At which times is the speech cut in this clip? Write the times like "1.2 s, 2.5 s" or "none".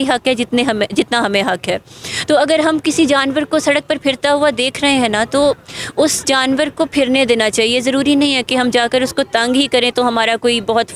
none